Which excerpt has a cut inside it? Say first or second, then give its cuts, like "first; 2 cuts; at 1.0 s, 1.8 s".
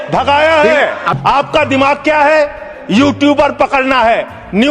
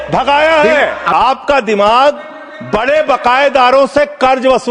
first; 1 cut; at 1.0 s